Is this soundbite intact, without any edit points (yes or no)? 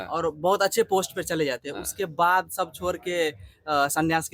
yes